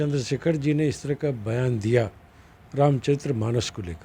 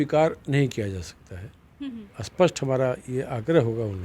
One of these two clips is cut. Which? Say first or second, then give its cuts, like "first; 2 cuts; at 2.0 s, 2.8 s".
second; 1 cut; at 1.9 s